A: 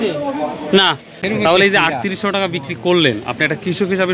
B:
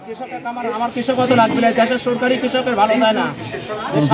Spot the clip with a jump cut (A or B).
A